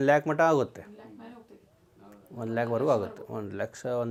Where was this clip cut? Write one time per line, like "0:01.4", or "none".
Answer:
none